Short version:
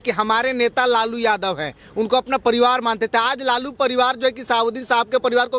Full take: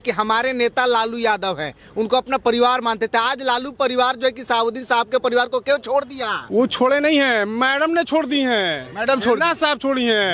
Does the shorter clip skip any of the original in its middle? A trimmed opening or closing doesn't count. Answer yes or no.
no